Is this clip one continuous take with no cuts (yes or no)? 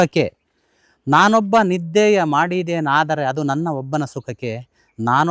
yes